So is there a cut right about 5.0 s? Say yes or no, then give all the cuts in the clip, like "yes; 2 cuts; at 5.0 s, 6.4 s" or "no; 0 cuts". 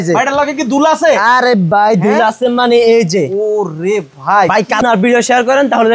yes; 1 cut; at 5.0 s